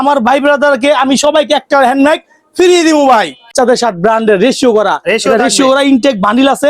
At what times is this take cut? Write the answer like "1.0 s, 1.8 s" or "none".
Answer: 3.5 s